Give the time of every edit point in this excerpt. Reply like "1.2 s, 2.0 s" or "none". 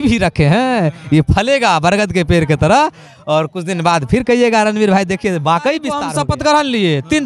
6.0 s